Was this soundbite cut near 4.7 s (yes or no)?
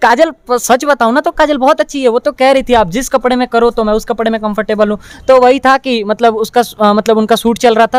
no